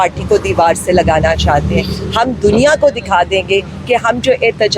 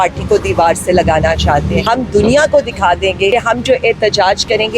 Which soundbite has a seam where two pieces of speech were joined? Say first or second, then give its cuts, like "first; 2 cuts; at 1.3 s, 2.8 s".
second; 2 cuts; at 1.8 s, 3.3 s